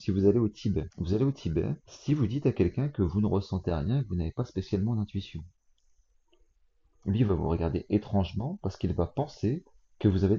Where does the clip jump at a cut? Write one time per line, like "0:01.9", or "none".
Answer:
0:00.9
0:01.9